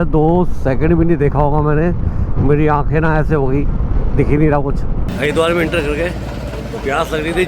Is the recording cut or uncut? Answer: cut